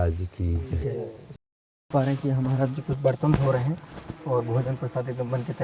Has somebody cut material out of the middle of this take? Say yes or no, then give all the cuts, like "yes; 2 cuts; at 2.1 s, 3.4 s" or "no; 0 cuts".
yes; 1 cut; at 1.2 s